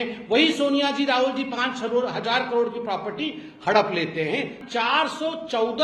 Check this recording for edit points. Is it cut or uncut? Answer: cut